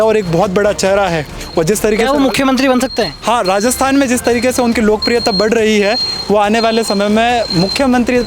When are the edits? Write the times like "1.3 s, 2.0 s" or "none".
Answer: 1.4 s